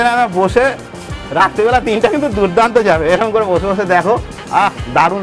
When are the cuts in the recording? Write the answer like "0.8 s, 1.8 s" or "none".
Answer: none